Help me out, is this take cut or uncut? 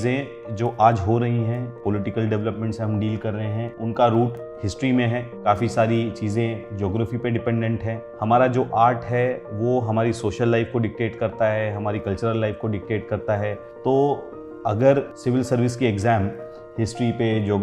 cut